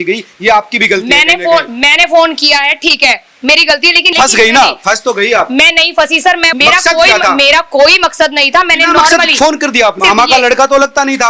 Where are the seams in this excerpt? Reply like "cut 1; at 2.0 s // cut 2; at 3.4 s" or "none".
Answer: cut 1; at 4.1 s // cut 2; at 6.5 s // cut 3; at 10.0 s